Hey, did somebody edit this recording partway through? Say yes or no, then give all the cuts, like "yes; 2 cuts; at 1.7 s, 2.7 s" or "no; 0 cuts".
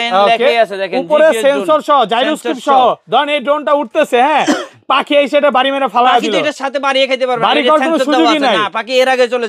no; 0 cuts